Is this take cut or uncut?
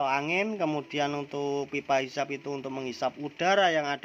uncut